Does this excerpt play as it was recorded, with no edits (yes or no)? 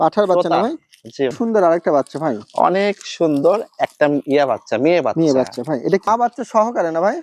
no